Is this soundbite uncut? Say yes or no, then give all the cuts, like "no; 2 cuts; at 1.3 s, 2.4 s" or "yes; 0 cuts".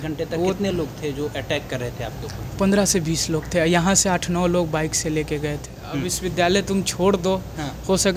no; 1 cut; at 5.7 s